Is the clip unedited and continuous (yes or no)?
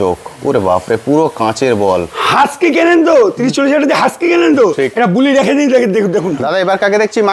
no